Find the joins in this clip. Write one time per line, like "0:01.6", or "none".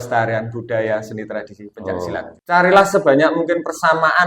0:02.3